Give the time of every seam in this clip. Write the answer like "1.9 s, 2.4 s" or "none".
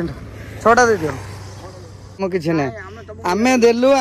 2.2 s